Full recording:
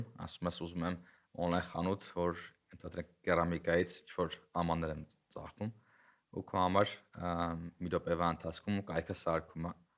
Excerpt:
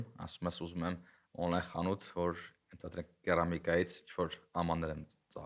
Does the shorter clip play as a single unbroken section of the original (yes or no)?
yes